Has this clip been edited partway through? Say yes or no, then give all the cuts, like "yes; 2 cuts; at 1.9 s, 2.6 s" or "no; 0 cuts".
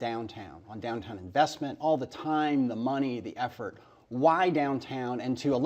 yes; 1 cut; at 4.2 s